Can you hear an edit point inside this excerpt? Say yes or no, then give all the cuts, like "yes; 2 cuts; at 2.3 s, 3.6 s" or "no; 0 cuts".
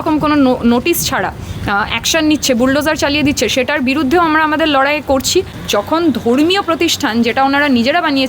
yes; 1 cut; at 5.6 s